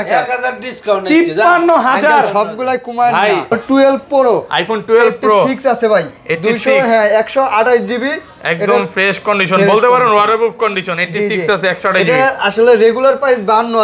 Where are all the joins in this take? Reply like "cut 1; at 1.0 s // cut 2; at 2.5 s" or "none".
cut 1; at 3.5 s